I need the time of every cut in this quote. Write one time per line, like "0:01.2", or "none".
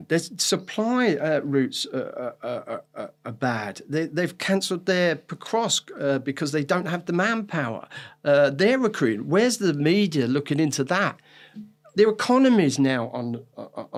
none

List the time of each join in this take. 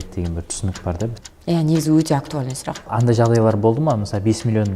0:01.3
0:02.8

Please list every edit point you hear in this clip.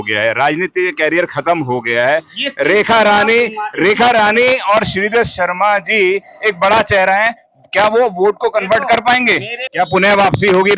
0:09.6

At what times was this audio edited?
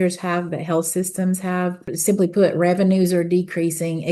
0:01.9

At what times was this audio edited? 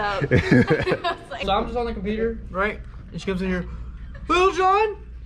0:01.3

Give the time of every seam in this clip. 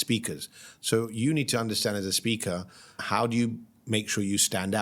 0:03.0

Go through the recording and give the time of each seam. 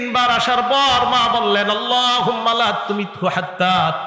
none

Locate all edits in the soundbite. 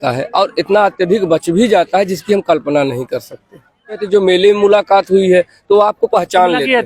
0:04.0

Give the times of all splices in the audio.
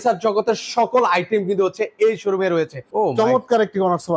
0:02.8

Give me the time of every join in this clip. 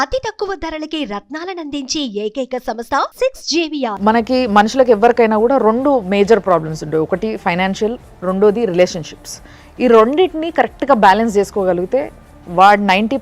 0:03.9

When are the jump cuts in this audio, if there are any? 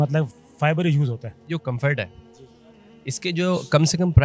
0:01.4

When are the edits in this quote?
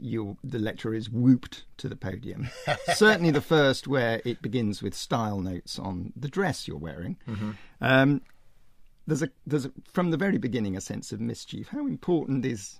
0:02.2

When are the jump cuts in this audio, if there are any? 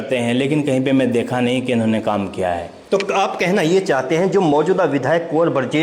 0:04.0

